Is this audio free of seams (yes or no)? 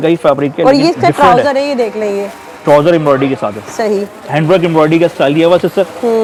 yes